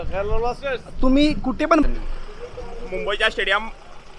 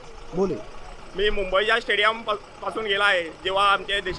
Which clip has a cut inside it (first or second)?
first